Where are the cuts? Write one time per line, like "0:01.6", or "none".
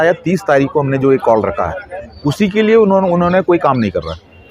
none